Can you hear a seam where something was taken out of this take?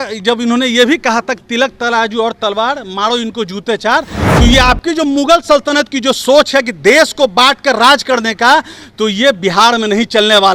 no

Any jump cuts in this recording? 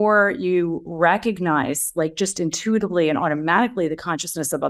no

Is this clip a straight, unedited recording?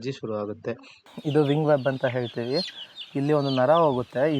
no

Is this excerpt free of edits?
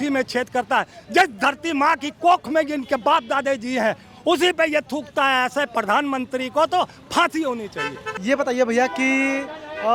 yes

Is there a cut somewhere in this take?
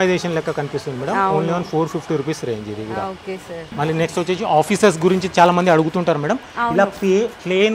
yes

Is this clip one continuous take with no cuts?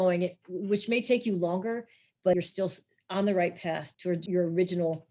no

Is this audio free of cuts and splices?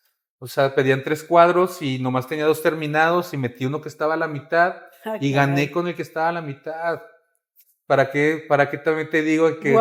yes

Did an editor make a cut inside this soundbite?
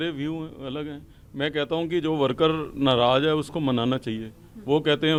no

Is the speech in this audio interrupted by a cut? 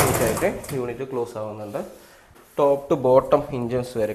yes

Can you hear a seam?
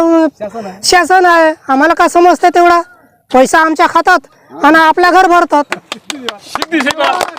no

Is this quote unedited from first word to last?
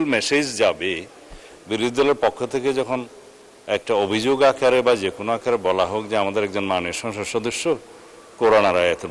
yes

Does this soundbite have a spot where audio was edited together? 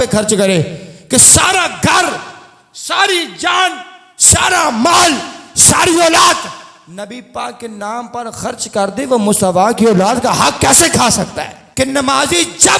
yes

